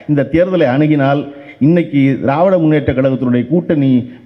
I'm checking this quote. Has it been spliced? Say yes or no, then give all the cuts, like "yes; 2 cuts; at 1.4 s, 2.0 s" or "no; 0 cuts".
no; 0 cuts